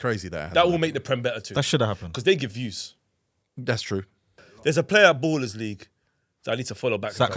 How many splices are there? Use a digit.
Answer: 1